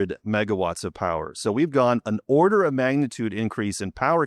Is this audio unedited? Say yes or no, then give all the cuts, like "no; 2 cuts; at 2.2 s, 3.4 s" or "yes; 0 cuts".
no; 1 cut; at 2.0 s